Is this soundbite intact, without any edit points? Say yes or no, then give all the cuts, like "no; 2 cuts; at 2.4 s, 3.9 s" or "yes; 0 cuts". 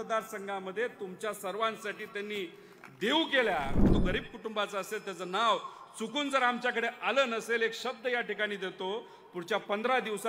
no; 1 cut; at 3.9 s